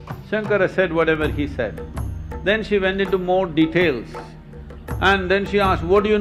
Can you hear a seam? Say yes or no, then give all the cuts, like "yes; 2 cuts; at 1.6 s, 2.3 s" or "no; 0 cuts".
no; 0 cuts